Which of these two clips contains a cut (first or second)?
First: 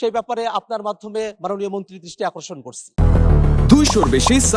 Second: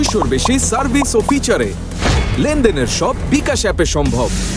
first